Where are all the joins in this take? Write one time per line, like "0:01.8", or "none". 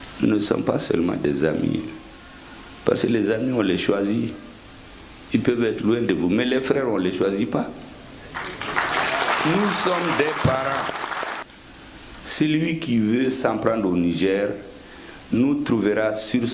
0:11.3